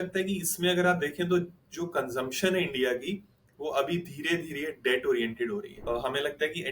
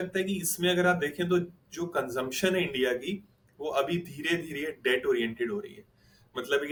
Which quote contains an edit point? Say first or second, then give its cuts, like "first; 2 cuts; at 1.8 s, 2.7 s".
first; 1 cut; at 5.7 s